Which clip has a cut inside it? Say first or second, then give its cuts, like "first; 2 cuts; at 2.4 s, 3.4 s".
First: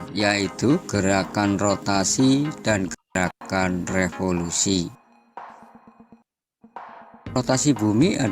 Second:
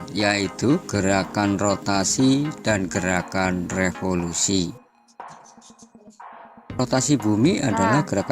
second; 2 cuts; at 3.1 s, 6.2 s